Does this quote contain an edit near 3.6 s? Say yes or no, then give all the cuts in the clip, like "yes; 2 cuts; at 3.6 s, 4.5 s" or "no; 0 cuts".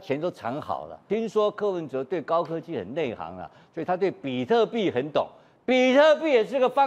no; 1 cut; at 1.0 s